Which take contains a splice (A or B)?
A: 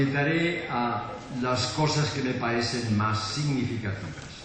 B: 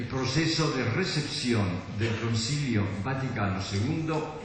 B